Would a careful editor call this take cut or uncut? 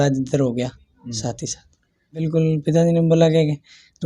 cut